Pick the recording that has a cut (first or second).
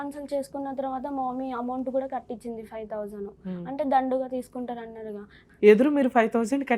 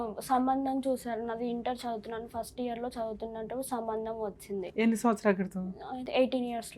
first